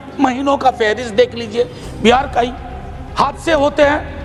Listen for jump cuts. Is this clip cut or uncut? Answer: uncut